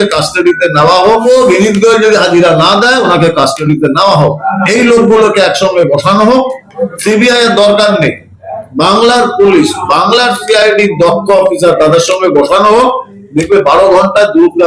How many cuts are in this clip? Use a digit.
3